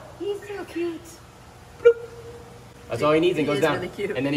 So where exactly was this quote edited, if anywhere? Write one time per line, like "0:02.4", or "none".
none

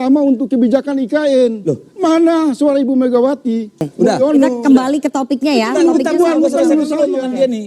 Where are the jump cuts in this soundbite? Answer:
0:03.9

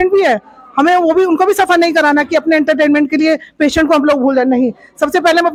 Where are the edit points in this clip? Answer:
none

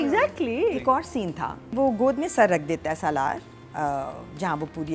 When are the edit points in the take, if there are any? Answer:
0:01.7

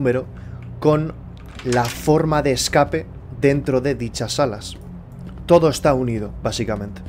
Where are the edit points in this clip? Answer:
none

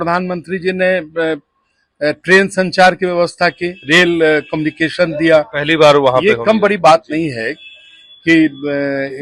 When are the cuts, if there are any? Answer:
none

